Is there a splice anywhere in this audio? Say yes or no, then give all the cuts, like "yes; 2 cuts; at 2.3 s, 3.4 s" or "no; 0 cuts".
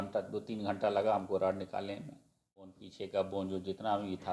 yes; 1 cut; at 2.8 s